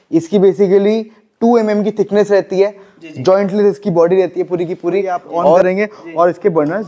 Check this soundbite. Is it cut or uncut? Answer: cut